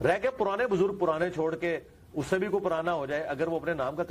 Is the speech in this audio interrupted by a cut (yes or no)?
no